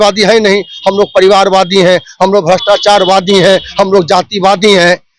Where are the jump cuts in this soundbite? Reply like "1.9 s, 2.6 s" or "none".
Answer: none